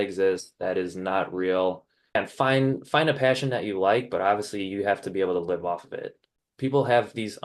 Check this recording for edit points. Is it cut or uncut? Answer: cut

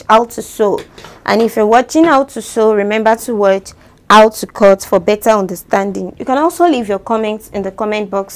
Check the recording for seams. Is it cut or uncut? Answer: uncut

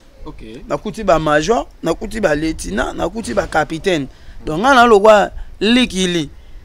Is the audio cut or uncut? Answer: uncut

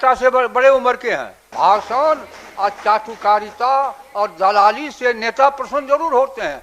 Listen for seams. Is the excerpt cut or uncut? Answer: cut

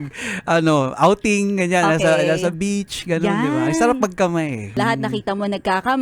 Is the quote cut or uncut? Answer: cut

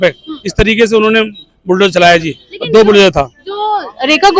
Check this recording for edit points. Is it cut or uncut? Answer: uncut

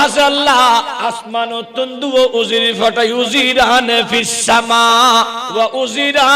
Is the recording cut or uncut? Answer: cut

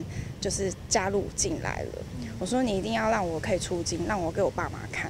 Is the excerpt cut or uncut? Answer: uncut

